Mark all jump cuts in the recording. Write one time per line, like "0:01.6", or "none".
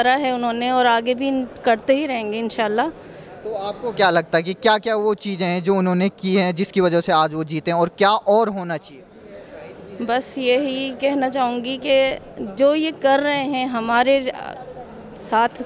none